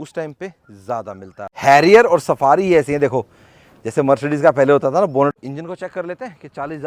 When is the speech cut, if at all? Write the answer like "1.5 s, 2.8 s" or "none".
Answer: 1.4 s, 5.4 s